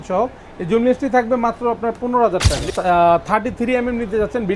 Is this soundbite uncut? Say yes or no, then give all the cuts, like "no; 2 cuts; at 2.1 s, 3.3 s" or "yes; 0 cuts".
no; 1 cut; at 2.7 s